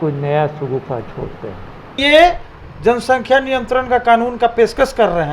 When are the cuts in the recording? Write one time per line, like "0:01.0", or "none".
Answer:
0:02.0